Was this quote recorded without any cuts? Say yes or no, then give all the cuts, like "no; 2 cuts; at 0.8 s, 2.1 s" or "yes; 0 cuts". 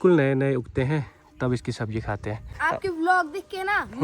no; 1 cut; at 2.5 s